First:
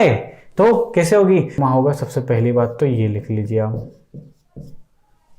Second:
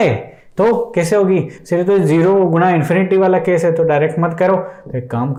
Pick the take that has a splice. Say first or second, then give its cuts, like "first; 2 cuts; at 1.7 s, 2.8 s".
first; 1 cut; at 1.6 s